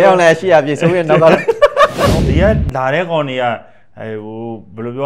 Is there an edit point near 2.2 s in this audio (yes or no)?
yes